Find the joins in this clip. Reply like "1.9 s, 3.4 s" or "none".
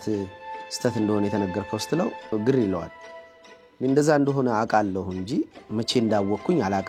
2.2 s